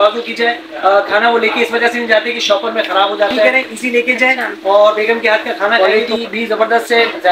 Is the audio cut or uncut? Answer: cut